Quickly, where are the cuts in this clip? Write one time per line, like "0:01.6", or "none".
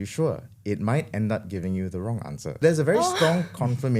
0:02.6